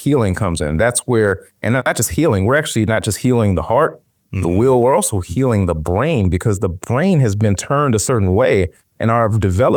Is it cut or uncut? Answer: uncut